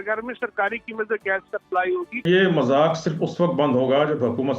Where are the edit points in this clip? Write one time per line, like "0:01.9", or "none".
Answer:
0:02.2